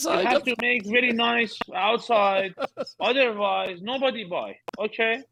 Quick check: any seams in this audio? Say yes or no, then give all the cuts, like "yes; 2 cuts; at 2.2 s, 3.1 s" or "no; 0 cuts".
no; 0 cuts